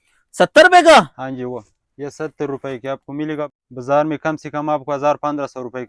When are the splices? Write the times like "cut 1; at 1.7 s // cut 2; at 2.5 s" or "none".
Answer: cut 1; at 3.5 s